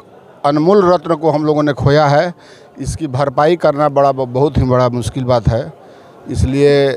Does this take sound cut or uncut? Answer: uncut